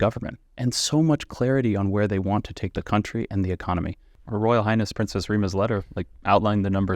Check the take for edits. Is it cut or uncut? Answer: cut